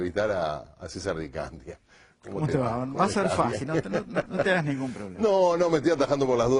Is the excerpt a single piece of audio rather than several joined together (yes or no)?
no